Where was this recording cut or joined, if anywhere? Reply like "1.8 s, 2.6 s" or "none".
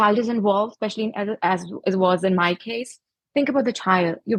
none